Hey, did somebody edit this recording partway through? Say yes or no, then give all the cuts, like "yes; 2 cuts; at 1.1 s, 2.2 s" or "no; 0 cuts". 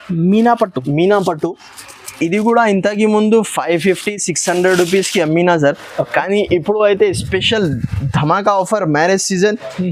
no; 0 cuts